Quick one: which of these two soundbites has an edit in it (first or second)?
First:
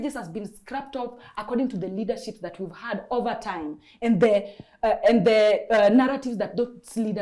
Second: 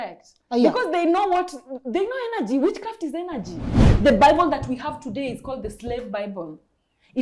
second